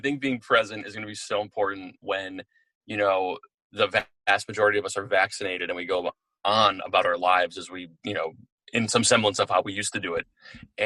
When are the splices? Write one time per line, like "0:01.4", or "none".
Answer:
none